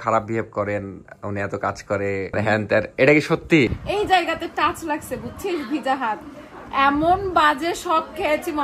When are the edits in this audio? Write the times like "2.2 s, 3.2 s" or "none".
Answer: 2.3 s, 3.7 s